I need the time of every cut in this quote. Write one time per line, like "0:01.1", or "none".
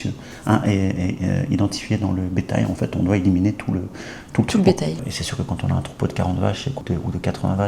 0:05.0
0:06.8